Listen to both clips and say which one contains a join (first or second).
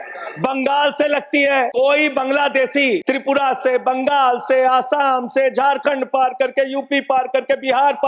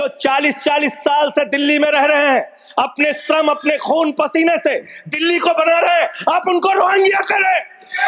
first